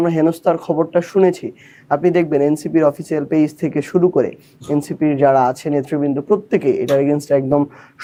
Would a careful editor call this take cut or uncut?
uncut